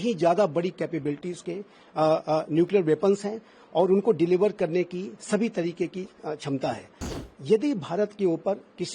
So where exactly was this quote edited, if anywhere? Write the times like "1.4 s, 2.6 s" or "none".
7.2 s